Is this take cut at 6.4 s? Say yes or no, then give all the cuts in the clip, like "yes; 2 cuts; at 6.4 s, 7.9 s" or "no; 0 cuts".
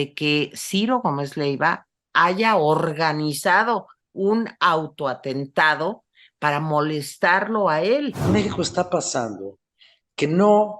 no; 1 cut; at 8.3 s